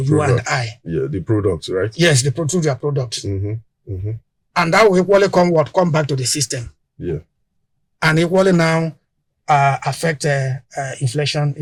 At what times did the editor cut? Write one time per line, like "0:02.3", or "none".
none